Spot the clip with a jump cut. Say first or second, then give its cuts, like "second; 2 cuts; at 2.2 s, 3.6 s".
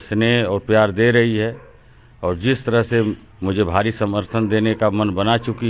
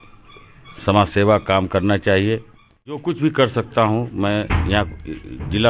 second; 1 cut; at 3.1 s